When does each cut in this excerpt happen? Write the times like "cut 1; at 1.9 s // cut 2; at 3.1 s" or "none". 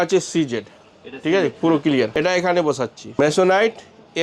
cut 1; at 2.1 s // cut 2; at 3.2 s